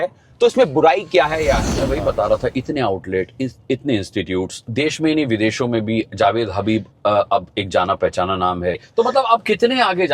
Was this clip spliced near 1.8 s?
yes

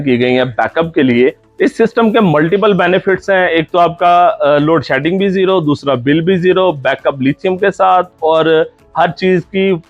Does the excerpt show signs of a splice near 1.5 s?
yes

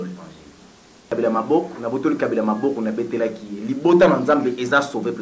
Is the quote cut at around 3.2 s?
no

